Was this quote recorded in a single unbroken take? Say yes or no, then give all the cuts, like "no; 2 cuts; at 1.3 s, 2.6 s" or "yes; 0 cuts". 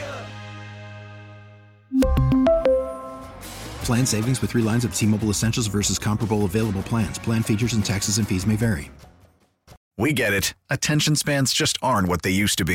no; 1 cut; at 9.9 s